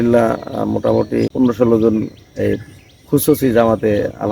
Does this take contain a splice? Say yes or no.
yes